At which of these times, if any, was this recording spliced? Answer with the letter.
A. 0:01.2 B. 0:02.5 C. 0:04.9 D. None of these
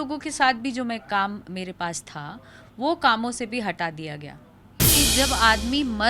C